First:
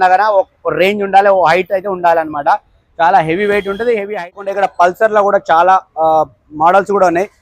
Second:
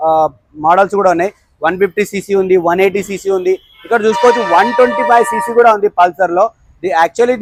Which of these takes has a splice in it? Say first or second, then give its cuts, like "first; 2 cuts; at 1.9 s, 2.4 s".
first; 1 cut; at 4.4 s